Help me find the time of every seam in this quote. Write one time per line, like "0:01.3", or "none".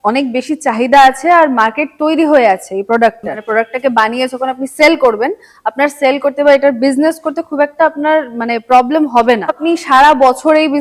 0:03.4
0:09.6